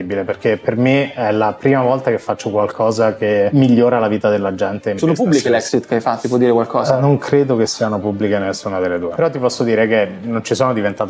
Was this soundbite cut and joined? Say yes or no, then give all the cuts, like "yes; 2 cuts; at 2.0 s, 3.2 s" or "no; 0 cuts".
yes; 1 cut; at 5.0 s